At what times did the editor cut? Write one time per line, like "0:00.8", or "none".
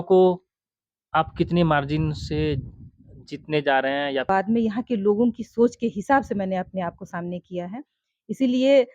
0:04.3